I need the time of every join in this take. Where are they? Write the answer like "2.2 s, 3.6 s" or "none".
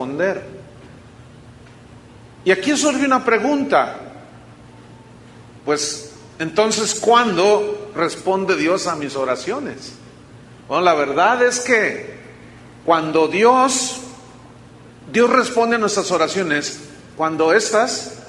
13.8 s

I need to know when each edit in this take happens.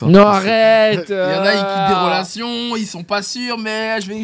none

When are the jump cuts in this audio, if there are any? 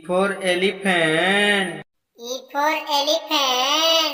none

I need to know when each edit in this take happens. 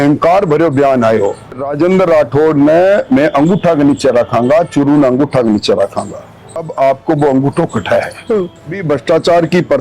1.7 s, 6.6 s, 8.6 s

